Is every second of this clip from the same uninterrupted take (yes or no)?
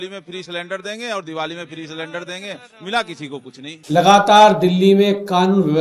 no